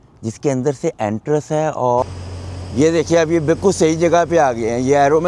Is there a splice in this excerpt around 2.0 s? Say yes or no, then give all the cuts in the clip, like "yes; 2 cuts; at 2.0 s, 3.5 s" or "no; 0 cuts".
yes; 1 cut; at 2.0 s